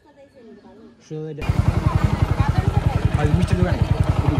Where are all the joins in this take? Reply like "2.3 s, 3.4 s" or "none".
1.4 s